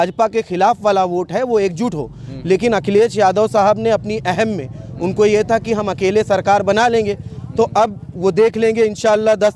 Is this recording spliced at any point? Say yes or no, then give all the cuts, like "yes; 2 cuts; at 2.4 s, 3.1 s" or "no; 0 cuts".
no; 0 cuts